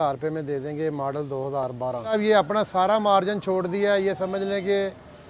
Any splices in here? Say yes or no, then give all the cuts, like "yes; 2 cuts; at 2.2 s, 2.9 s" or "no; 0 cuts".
yes; 1 cut; at 2.1 s